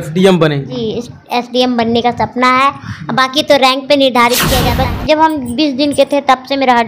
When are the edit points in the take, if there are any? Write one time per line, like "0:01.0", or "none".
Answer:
0:04.7